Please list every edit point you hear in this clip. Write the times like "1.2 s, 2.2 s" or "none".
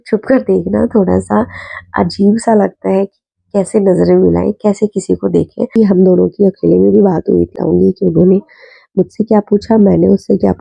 5.8 s, 7.5 s